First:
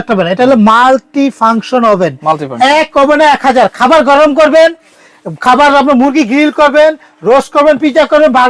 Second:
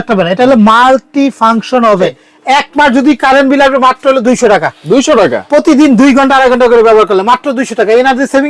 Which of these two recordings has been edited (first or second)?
second